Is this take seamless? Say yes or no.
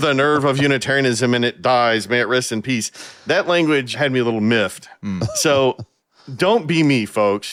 yes